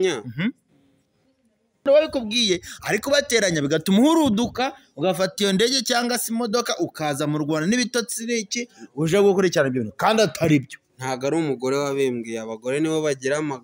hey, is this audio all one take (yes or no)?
no